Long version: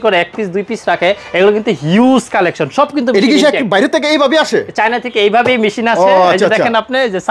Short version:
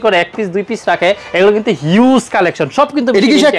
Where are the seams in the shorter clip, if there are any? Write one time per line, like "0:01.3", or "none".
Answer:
none